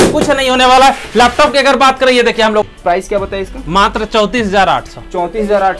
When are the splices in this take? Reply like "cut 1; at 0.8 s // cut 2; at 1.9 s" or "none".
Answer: cut 1; at 2.6 s